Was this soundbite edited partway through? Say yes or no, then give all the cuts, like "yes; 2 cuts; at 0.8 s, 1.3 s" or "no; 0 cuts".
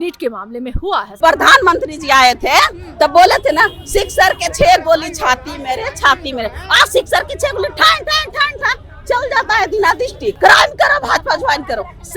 yes; 2 cuts; at 1.1 s, 10.4 s